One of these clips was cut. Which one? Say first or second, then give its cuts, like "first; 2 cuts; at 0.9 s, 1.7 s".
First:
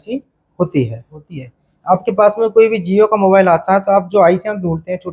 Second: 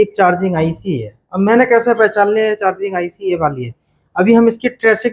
first; 1 cut; at 1.2 s